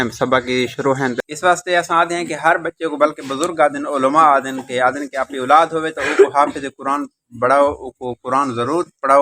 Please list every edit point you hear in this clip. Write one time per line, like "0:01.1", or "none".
0:01.2